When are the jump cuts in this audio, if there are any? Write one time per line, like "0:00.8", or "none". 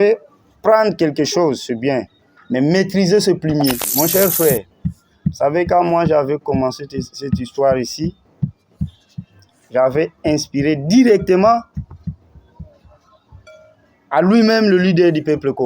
0:03.9